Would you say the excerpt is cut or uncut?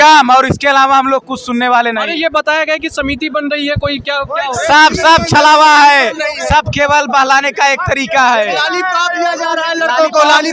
uncut